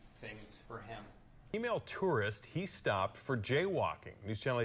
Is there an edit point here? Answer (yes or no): yes